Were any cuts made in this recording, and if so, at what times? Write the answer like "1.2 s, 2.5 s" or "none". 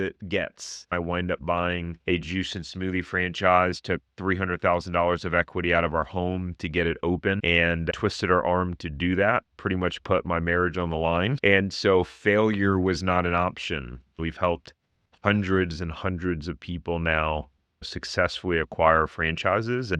0.9 s, 14.2 s

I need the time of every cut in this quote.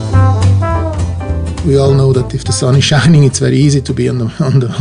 1.6 s

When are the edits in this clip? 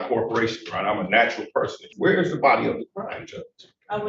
1.9 s

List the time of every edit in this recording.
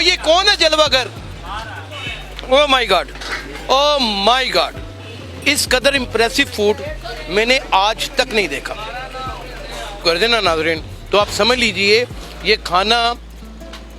none

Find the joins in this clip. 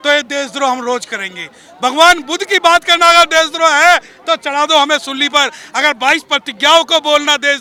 none

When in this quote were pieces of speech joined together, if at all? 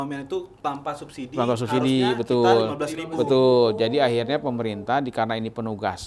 none

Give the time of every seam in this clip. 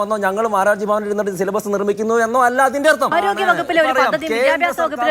3.1 s

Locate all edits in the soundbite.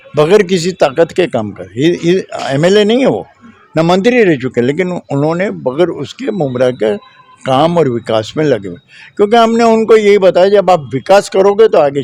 none

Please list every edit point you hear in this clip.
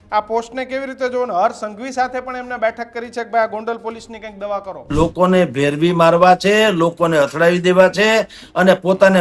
4.8 s

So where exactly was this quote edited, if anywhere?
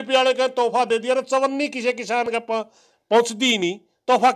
none

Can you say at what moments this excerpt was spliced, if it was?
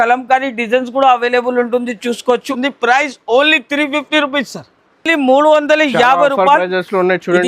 2.5 s

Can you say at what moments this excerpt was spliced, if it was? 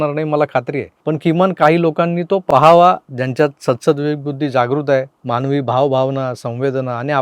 5.2 s

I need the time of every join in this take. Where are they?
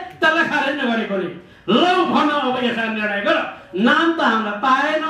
none

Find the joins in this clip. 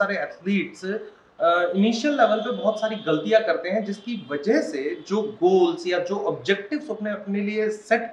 none

